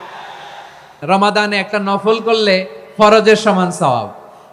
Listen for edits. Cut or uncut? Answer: cut